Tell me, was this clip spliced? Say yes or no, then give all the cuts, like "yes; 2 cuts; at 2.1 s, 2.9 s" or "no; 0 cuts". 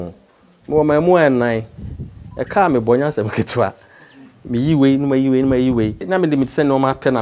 yes; 1 cut; at 6.1 s